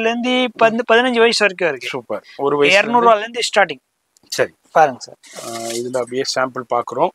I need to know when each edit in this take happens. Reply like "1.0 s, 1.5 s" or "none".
none